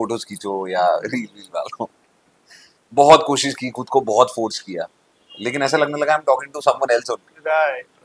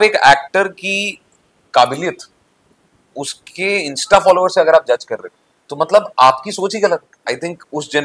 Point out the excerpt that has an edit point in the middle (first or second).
second